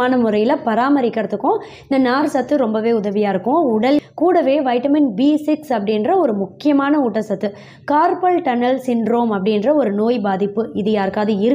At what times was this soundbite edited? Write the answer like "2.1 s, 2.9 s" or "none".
4.0 s